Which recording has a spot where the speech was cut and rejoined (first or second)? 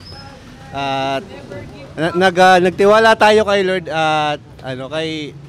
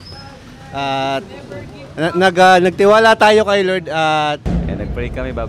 second